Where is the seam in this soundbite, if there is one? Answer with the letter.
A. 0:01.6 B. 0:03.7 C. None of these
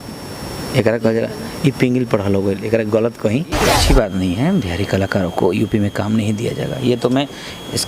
B